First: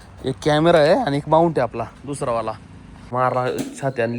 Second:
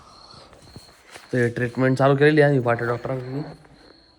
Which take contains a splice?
first; 1 cut; at 3.1 s

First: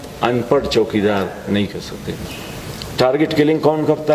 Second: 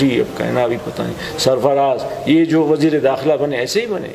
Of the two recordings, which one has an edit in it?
first; 1 cut; at 2.2 s

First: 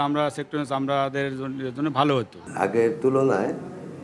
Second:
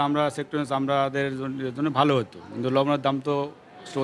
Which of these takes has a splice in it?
first; 1 cut; at 2.4 s

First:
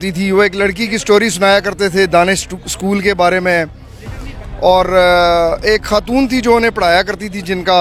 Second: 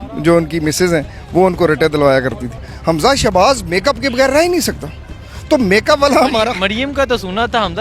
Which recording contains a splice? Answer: second; 1 cut; at 2.6 s

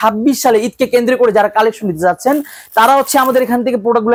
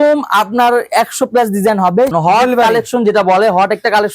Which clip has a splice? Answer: second; 1 cut; at 2.1 s

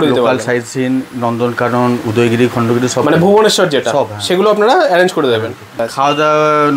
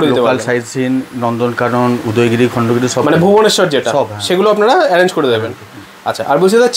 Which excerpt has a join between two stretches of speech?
first; 1 cut; at 5.8 s

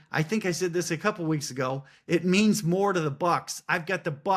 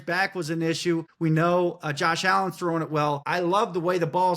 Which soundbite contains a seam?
second; 2 cuts; at 1.1 s, 3.2 s

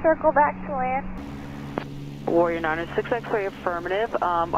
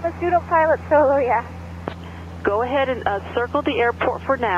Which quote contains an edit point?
second; 1 cut; at 1.9 s

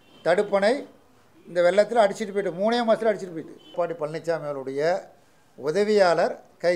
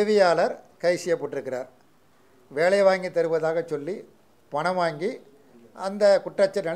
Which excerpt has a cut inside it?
first; 1 cut; at 3.7 s

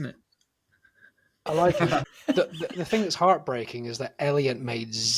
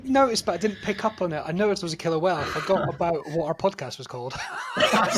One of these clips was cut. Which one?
first; 1 cut; at 2.1 s

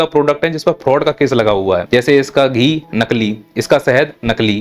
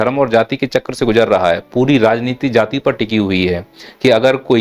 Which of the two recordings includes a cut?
first; 1 cut; at 1.8 s

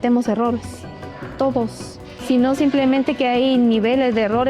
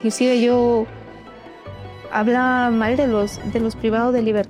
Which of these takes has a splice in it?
first; 1 cut; at 2.1 s

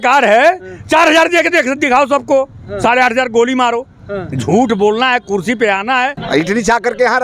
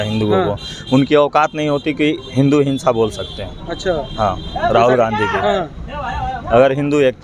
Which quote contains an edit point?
first; 1 cut; at 6.2 s

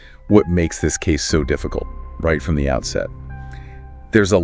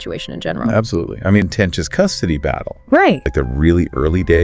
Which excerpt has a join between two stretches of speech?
second; 2 cuts; at 1.4 s, 3.3 s

